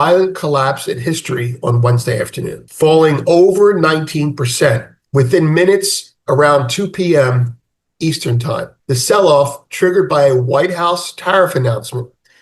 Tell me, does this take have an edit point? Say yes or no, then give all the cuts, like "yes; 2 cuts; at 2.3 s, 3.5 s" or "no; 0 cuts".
yes; 2 cuts; at 2.6 s, 8.8 s